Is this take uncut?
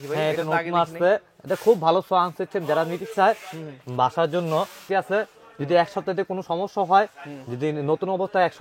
no; 1 cut; at 4.9 s

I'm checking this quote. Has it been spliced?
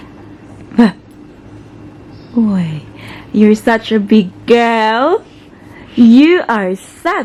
no; 0 cuts

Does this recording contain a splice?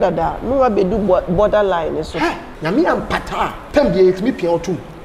yes; 2 cuts; at 2.5 s, 3.6 s

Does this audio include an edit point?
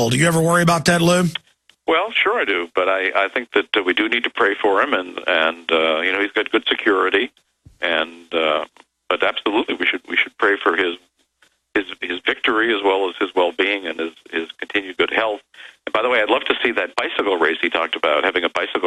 no; 0 cuts

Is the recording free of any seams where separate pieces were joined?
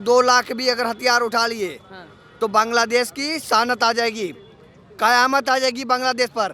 yes; 0 cuts

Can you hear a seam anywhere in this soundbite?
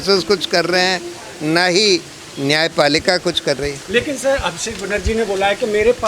no; 0 cuts

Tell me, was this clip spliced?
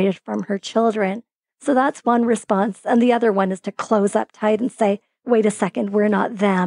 no; 0 cuts

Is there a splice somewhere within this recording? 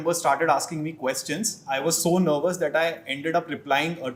no; 0 cuts

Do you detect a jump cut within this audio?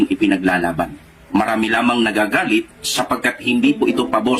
no; 0 cuts

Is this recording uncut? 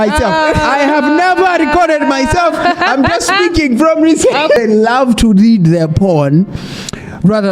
no; 1 cut; at 4.6 s

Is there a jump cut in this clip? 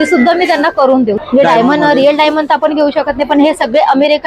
yes; 1 cut; at 1.2 s

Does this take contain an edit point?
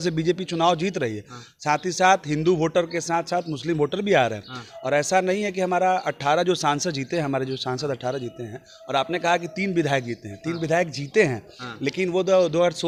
no; 0 cuts

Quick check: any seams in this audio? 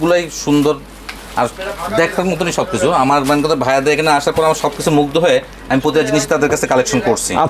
no; 0 cuts

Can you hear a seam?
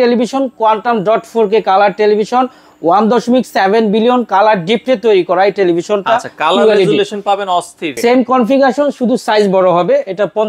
yes; 1 cut; at 7.9 s

